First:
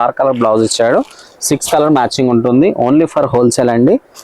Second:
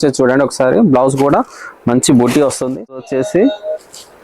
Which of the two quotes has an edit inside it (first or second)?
second